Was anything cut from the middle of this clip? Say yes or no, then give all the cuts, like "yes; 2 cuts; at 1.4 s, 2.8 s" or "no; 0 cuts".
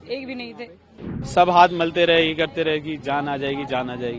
yes; 1 cut; at 1.1 s